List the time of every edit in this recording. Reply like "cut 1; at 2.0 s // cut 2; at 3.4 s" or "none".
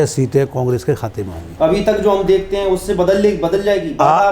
cut 1; at 1.4 s